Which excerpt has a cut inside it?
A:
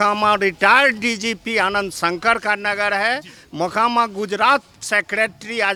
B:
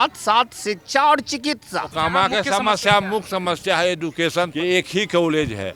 B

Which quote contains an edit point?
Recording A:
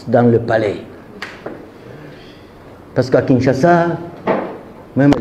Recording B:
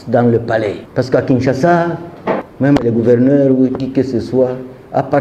B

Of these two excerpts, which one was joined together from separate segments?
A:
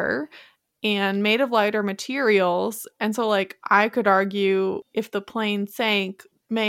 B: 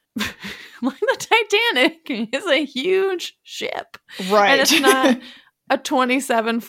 A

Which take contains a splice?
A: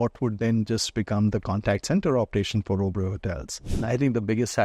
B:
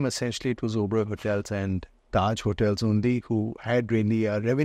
A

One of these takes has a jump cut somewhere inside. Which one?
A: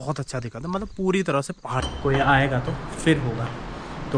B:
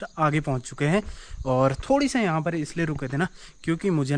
A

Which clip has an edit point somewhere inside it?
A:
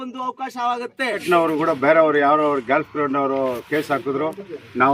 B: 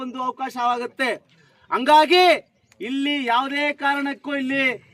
A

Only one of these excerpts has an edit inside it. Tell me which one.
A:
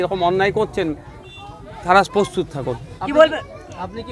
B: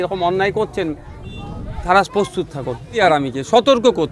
B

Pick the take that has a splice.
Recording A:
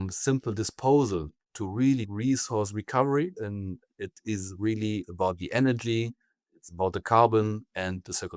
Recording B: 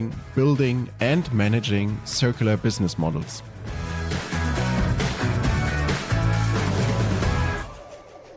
A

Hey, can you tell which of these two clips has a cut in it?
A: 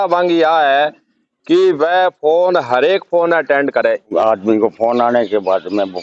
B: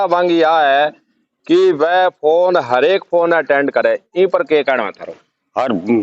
A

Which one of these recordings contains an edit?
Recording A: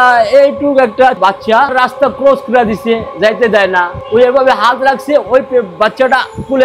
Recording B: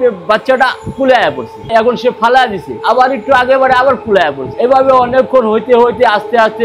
A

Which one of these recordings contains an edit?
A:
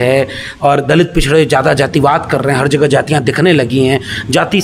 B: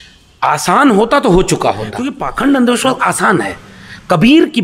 B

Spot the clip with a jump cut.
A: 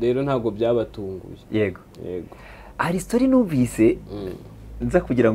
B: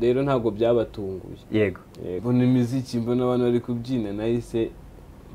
B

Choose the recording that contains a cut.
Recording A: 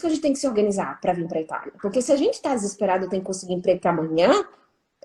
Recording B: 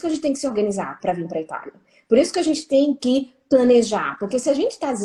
A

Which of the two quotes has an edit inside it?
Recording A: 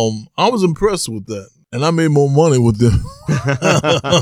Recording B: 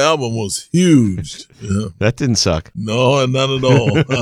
B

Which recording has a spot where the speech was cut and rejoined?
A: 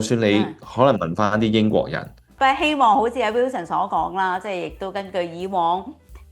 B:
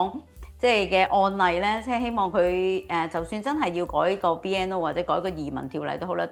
A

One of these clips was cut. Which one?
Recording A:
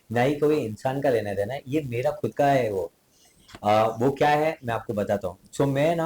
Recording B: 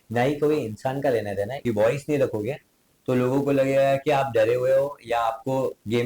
B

